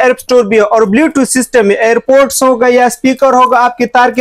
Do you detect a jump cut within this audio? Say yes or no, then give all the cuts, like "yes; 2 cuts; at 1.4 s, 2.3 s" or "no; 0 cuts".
no; 0 cuts